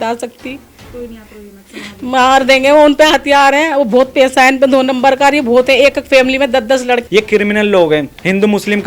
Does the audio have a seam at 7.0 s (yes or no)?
yes